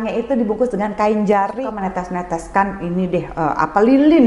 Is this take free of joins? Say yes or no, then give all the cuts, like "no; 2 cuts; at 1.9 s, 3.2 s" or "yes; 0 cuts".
no; 1 cut; at 1.5 s